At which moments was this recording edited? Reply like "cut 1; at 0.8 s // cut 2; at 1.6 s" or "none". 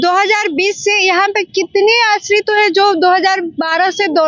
none